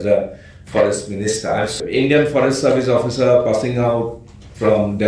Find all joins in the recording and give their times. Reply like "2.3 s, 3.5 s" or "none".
1.7 s